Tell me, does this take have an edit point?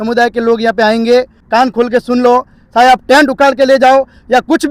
yes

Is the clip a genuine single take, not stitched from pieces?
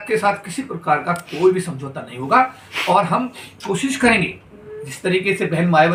yes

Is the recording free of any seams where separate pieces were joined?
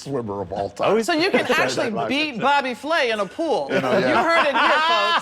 no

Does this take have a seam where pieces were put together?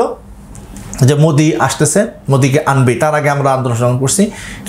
no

